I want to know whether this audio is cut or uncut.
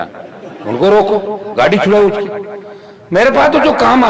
uncut